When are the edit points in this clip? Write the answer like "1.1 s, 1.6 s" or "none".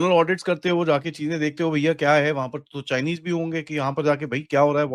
none